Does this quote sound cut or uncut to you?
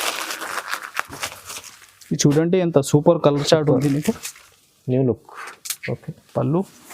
cut